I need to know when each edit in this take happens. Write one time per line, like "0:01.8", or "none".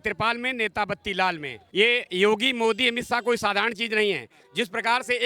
0:01.6